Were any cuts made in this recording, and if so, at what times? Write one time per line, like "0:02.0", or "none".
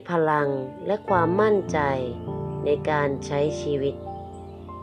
0:03.9